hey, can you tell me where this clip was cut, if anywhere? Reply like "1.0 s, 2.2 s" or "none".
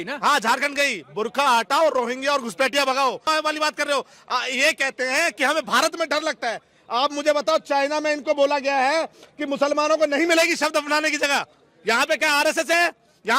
3.3 s